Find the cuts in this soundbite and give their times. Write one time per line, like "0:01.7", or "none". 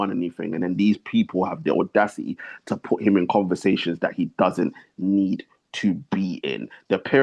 none